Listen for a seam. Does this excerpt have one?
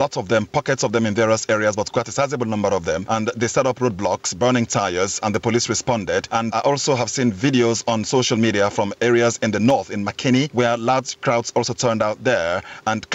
yes; 3 cuts; at 3.0 s, 6.5 s, 10.5 s

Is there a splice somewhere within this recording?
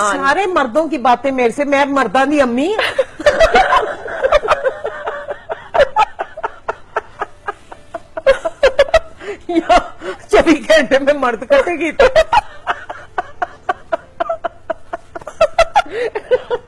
no; 0 cuts

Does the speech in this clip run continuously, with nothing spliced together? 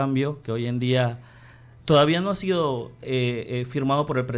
yes; 0 cuts

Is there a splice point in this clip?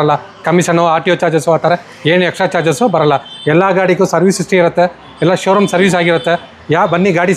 no; 0 cuts

